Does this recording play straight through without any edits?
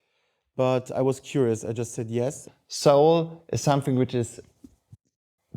no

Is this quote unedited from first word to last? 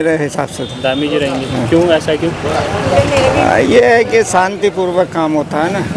yes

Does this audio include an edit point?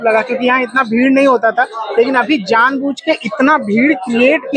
no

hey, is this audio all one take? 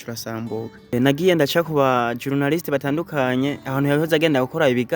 no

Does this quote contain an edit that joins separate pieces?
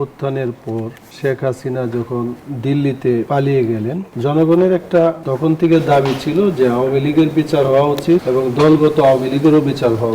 yes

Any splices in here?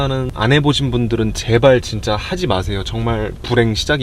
no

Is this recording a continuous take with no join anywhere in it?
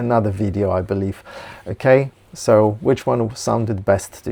yes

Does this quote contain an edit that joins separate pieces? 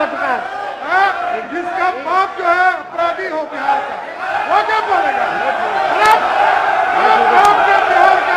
no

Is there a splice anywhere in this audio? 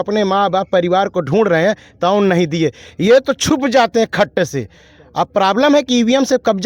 no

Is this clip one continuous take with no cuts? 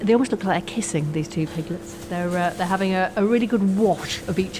yes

